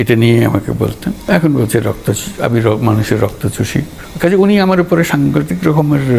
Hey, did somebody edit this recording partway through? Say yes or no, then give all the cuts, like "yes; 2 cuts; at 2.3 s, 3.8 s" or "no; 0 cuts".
yes; 2 cuts; at 1.1 s, 4.0 s